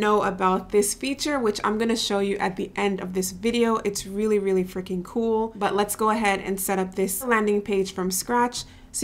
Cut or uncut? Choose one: cut